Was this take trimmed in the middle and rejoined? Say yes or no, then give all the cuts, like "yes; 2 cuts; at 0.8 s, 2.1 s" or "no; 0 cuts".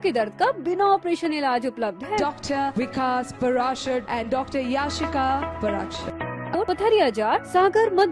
yes; 1 cut; at 6.5 s